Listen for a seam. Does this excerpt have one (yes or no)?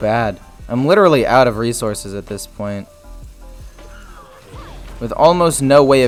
no